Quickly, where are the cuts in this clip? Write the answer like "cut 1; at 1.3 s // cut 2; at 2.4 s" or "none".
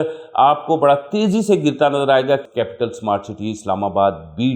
cut 1; at 2.5 s